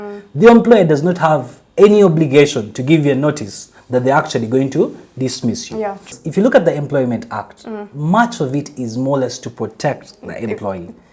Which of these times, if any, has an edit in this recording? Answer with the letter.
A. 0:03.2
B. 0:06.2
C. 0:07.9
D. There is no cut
B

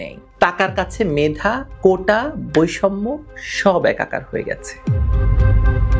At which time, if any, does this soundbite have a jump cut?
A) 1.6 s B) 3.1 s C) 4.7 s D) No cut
C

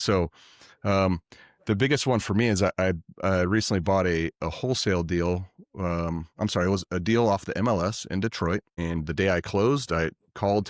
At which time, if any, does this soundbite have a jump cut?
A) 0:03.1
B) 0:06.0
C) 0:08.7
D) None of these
C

